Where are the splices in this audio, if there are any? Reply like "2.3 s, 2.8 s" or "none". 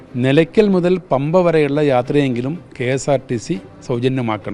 none